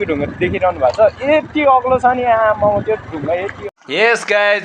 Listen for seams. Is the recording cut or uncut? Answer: cut